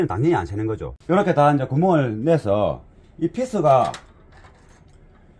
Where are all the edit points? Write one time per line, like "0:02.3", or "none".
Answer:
0:00.9

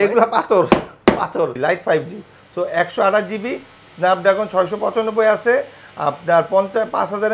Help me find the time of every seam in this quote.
0:01.6

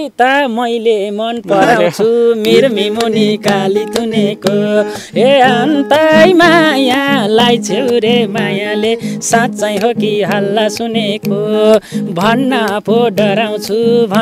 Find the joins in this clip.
none

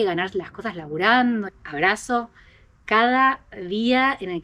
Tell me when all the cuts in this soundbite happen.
0:01.5

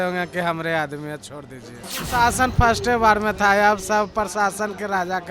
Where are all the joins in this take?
0:01.8

